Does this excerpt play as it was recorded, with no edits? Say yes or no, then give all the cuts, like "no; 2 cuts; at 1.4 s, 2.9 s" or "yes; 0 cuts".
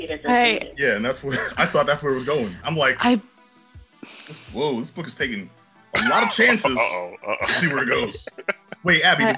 yes; 0 cuts